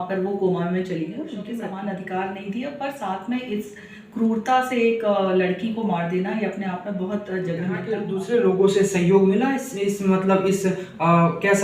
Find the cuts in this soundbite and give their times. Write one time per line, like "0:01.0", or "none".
0:01.5
0:08.1